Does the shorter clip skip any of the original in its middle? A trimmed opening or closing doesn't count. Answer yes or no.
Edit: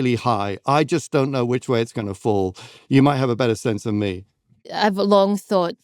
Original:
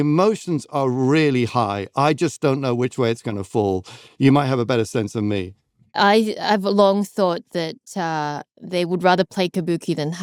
yes